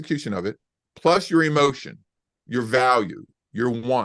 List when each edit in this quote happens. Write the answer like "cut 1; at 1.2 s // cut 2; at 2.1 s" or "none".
cut 1; at 1.8 s